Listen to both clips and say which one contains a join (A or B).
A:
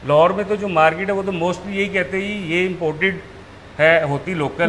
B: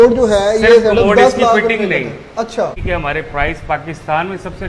B